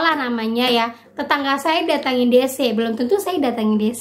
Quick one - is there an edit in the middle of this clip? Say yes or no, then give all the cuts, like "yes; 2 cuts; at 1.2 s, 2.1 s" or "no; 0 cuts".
no; 0 cuts